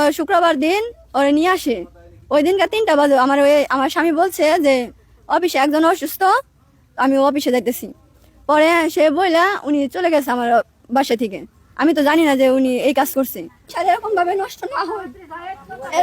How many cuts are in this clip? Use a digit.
1